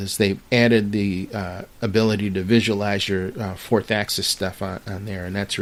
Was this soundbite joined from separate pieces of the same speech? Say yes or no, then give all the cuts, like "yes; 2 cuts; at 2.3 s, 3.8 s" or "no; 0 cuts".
no; 0 cuts